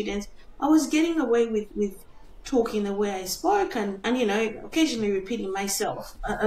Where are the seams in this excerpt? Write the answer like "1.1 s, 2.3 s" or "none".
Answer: 4.0 s